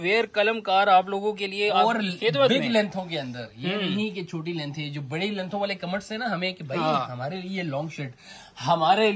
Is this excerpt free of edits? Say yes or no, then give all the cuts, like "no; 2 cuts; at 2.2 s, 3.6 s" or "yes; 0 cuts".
yes; 0 cuts